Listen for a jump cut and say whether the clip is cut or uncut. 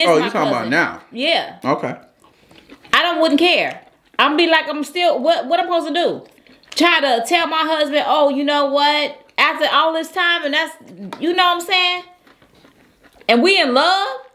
uncut